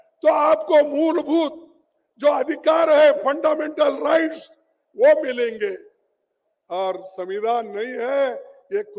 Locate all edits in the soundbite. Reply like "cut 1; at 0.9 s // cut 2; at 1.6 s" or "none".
none